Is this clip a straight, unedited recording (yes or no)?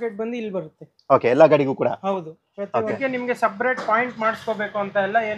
no